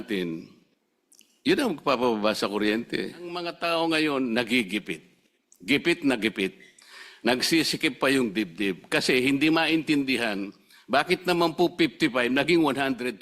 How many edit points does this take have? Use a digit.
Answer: 1